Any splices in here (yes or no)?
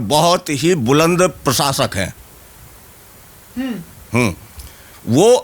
no